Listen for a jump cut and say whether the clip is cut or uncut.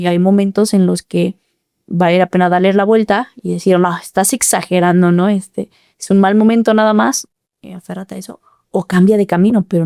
uncut